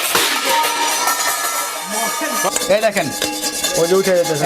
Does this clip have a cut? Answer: yes; 1 cut; at 2.5 s

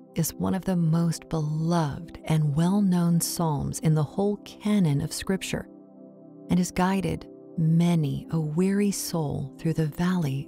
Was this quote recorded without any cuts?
yes; 0 cuts

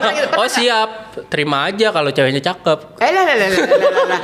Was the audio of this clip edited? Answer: no; 0 cuts

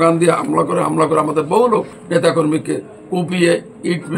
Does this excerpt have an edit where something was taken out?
yes; 1 cut; at 2.0 s

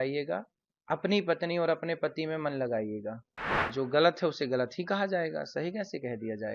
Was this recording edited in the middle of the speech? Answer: yes; 1 cut; at 3.6 s

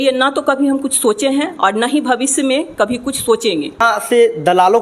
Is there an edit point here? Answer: yes; 1 cut; at 3.8 s

